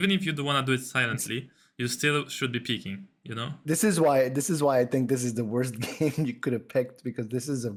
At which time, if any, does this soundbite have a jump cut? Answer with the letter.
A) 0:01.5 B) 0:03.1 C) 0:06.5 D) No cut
D